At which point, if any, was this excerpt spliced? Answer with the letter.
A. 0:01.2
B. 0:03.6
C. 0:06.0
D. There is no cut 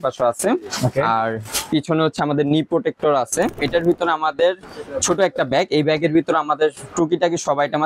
B